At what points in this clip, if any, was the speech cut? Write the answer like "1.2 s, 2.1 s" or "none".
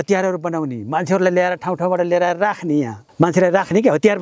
3.0 s